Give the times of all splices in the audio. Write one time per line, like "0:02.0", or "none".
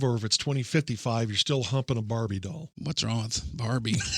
0:02.7